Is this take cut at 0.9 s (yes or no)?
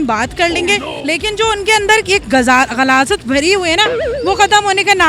yes